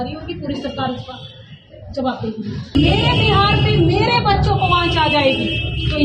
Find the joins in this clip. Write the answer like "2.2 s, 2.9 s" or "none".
2.8 s